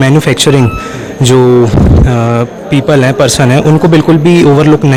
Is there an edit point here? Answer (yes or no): no